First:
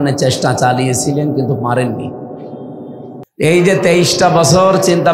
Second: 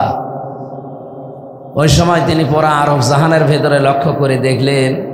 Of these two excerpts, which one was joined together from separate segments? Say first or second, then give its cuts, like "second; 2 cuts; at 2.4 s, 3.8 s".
first; 1 cut; at 3.2 s